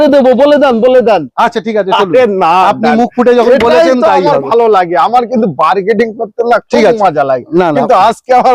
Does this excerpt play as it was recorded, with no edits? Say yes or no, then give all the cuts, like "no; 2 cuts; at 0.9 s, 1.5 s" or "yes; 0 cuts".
yes; 0 cuts